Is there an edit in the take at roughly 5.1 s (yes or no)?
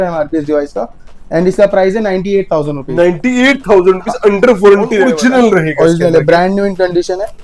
yes